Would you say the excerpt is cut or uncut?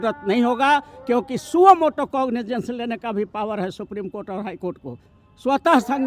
uncut